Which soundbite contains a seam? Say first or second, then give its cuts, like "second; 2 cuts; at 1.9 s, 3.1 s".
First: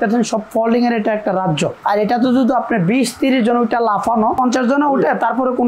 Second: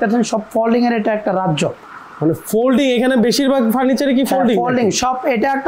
first; 2 cuts; at 1.8 s, 4.4 s